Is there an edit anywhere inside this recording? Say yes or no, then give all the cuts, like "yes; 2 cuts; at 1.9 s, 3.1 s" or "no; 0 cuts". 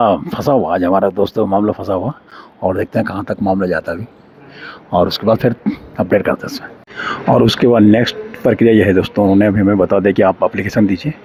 no; 0 cuts